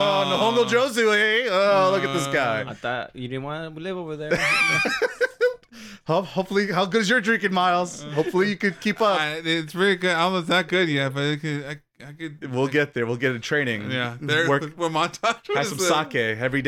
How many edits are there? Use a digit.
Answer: 0